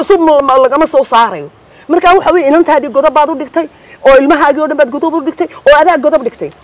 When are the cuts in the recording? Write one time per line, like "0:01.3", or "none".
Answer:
none